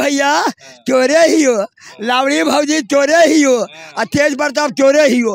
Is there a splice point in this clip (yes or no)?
no